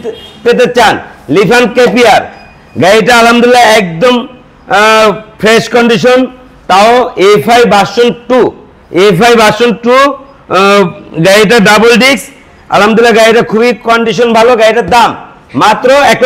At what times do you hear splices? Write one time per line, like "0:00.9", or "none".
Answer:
none